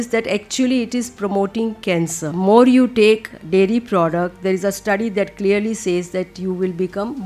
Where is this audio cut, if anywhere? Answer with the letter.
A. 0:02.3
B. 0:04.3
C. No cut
A